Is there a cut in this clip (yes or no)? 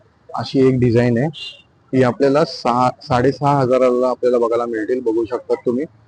no